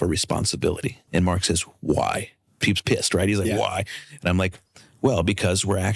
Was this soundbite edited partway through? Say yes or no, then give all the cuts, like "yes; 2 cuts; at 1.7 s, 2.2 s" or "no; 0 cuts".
yes; 2 cuts; at 1.0 s, 2.6 s